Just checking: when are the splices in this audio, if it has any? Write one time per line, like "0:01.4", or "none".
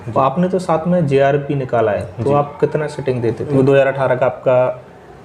0:03.4